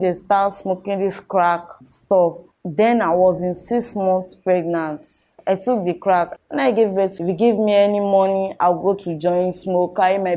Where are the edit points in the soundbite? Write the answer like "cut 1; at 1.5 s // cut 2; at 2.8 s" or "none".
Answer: cut 1; at 2.5 s // cut 2; at 6.3 s // cut 3; at 7.2 s